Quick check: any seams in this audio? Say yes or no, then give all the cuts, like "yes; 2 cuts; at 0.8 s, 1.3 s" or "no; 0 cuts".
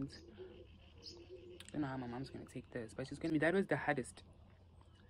yes; 1 cut; at 3.3 s